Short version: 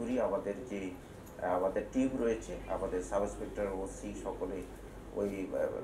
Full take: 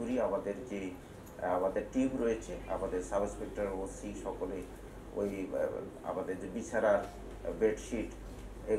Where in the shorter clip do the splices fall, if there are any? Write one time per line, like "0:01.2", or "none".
none

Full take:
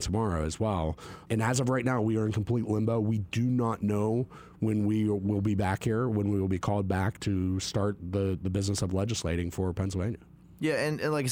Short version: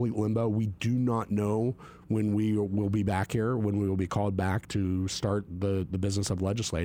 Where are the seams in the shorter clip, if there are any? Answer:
none

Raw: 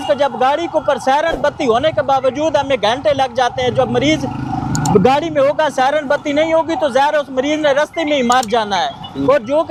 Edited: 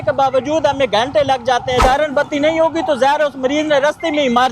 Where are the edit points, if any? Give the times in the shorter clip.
0:01.8

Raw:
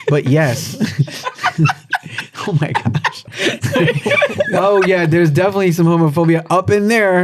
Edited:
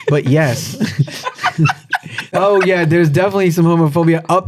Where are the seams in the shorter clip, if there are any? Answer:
0:02.3

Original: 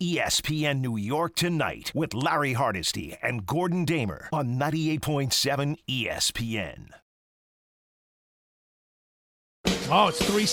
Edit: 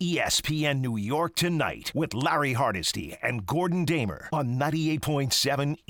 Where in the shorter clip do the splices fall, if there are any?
none

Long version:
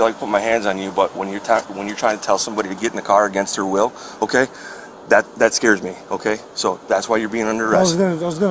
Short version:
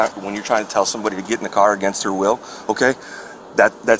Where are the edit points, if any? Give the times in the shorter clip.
none

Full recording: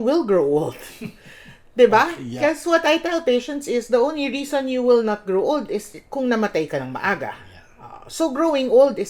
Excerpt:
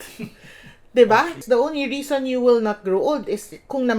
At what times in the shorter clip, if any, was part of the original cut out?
0:01.4

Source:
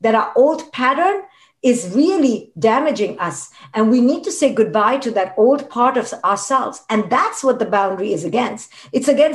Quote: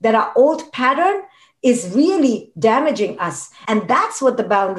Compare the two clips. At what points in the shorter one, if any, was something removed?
0:03.5

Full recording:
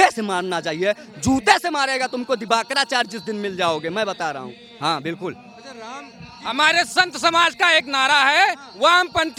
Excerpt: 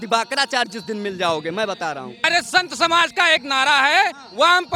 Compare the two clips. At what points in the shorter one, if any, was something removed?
0:02.2

